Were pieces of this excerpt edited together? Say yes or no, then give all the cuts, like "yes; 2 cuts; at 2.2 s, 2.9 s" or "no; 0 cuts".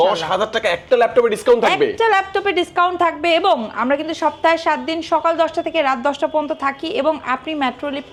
no; 0 cuts